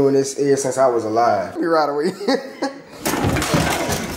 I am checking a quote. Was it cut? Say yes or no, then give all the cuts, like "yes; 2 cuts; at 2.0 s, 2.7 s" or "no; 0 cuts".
yes; 1 cut; at 1.5 s